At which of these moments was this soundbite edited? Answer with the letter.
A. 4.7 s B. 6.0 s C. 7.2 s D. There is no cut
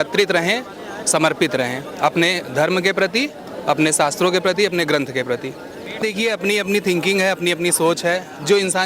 B